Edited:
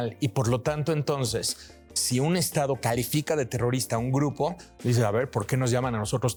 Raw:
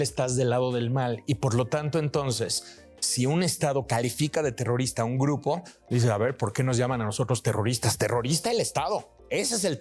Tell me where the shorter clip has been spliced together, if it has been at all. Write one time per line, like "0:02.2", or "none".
none